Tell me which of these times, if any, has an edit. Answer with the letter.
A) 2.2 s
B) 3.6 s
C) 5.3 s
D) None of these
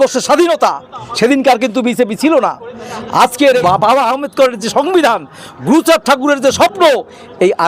B